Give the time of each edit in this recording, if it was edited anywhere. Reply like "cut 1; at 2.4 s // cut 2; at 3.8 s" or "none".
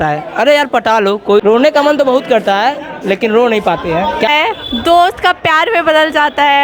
cut 1; at 1.4 s // cut 2; at 4.3 s